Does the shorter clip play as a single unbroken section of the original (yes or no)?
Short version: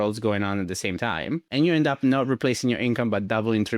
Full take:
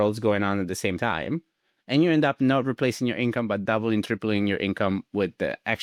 no